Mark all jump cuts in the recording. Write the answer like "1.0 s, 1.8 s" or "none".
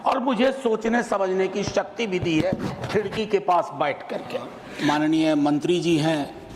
4.6 s